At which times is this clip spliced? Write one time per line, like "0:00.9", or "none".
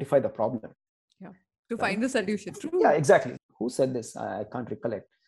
0:03.3